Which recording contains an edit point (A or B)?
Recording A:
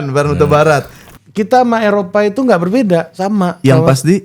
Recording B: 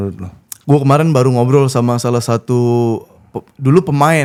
A